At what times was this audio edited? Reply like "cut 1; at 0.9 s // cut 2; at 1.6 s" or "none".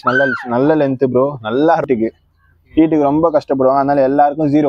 cut 1; at 1.8 s